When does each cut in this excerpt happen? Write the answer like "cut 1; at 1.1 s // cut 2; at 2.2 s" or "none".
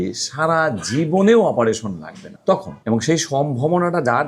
cut 1; at 2.6 s